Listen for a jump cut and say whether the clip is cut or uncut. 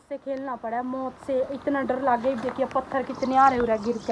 uncut